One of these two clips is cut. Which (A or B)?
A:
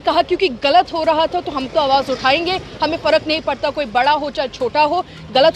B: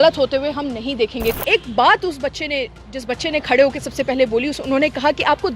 B